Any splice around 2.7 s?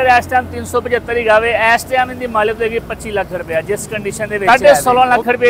no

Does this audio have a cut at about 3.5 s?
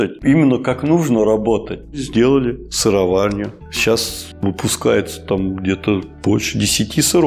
yes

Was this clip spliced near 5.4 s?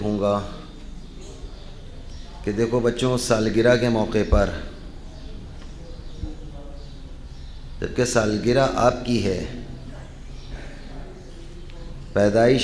no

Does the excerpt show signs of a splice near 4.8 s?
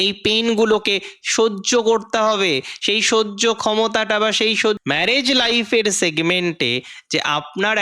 yes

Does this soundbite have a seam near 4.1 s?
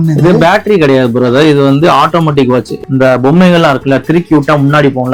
no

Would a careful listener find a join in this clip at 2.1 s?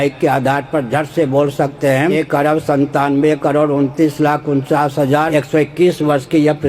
yes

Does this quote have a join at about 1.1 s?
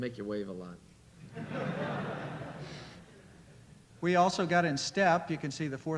no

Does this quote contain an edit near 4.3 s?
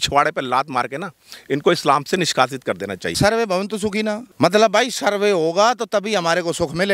yes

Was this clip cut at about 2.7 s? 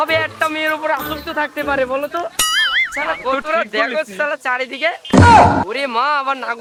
no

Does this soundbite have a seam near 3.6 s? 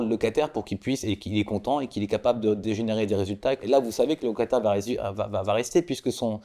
yes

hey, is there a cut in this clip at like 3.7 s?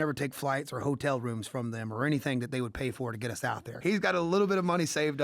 yes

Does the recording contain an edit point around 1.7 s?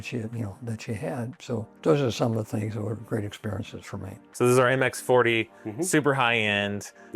yes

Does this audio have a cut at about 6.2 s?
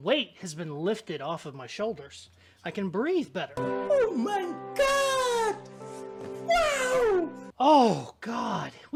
no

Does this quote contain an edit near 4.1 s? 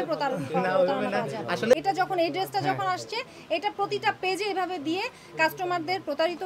no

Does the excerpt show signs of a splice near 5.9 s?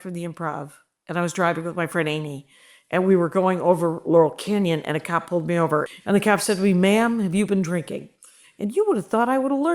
yes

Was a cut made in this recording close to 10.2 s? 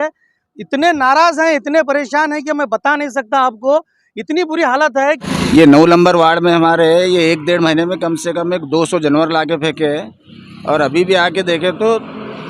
no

